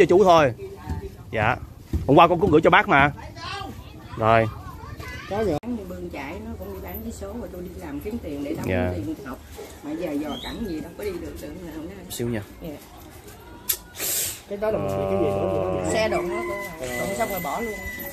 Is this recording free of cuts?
no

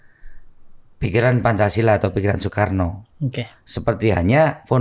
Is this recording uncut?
yes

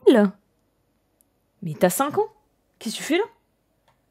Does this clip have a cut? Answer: no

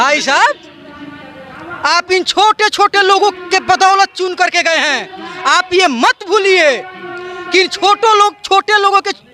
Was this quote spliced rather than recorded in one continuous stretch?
no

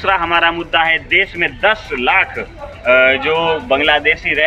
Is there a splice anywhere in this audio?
no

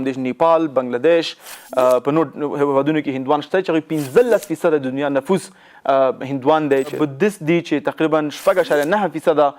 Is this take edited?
yes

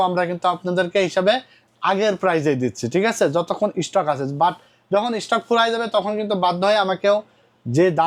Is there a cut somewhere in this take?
no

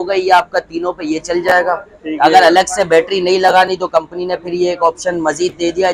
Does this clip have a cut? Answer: no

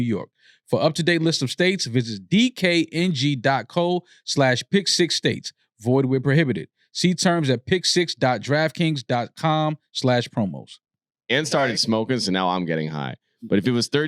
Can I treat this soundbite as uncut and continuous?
no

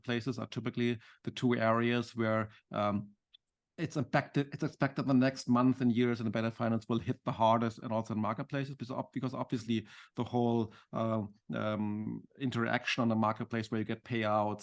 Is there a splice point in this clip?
no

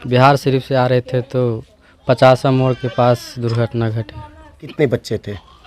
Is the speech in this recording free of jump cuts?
no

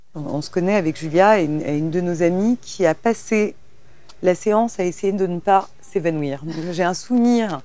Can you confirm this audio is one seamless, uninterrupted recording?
yes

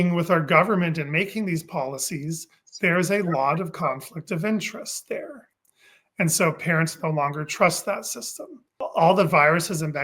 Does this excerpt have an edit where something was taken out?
yes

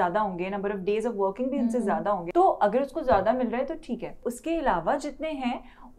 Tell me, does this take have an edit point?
yes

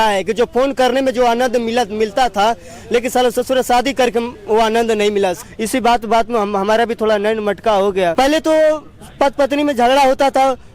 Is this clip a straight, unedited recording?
no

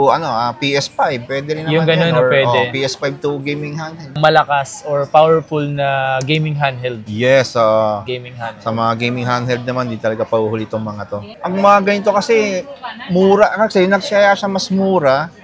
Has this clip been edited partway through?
yes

